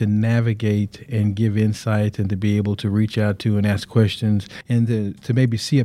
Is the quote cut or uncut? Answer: uncut